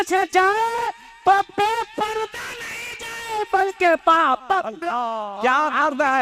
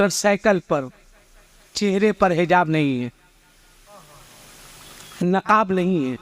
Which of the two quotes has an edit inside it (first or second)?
first